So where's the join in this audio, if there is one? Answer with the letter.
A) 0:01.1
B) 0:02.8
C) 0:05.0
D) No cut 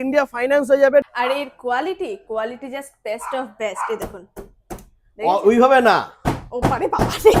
A